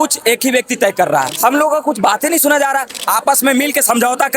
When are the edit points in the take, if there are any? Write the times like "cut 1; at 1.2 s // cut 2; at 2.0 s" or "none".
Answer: cut 1; at 1.3 s // cut 2; at 3.0 s